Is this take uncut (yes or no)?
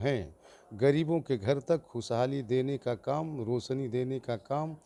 yes